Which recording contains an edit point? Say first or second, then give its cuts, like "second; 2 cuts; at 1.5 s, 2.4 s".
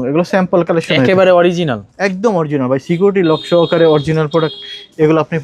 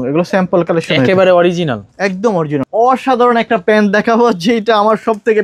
second; 1 cut; at 2.6 s